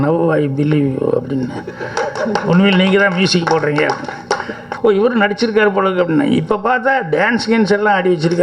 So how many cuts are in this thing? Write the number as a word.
one